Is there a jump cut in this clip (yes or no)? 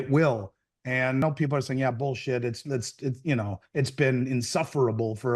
yes